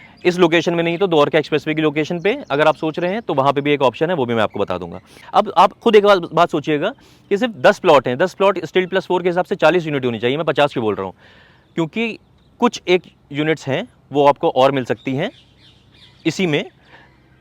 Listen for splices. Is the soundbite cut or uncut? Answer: cut